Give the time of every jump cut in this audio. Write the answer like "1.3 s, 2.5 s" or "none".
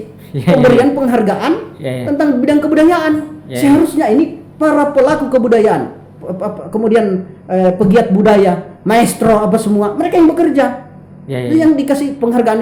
none